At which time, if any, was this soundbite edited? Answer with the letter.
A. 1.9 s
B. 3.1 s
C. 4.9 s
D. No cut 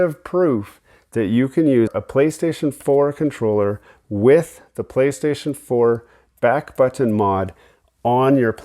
A